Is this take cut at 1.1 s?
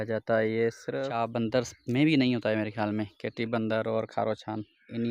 yes; 1 cut; at 1.1 s

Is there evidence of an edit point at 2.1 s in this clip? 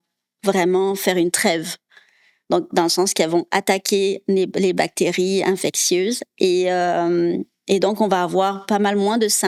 no; 0 cuts

